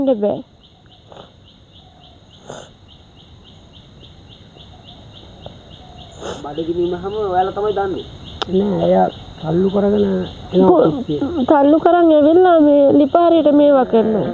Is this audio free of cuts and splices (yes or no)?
yes